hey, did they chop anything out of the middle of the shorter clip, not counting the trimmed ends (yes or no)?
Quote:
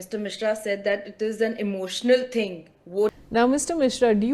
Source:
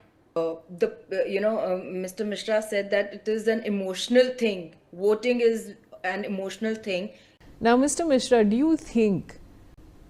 yes